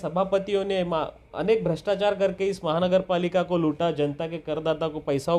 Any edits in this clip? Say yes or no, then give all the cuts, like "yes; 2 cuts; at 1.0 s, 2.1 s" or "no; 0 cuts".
no; 0 cuts